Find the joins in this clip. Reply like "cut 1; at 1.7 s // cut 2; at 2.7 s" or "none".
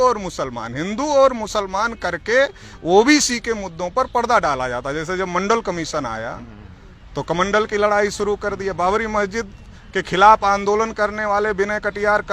none